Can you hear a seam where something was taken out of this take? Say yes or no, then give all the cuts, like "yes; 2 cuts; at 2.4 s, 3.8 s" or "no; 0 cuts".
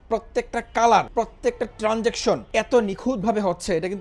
yes; 2 cuts; at 1.1 s, 2.5 s